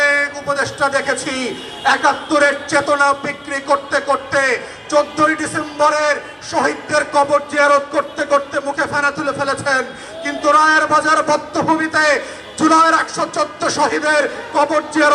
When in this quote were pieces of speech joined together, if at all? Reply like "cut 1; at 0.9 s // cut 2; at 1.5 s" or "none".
none